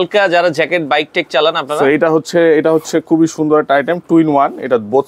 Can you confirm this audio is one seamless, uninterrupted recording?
yes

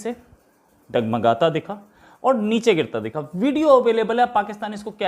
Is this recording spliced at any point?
no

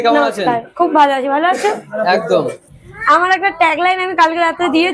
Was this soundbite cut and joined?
yes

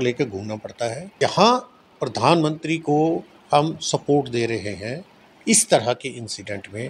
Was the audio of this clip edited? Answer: yes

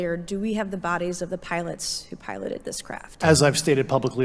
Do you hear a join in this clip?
yes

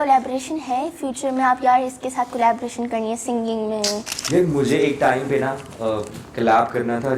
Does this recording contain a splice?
yes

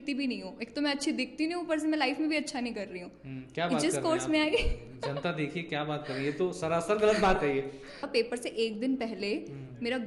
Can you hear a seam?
yes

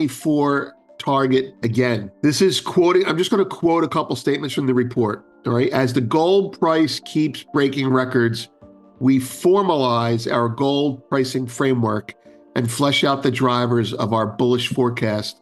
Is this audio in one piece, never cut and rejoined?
no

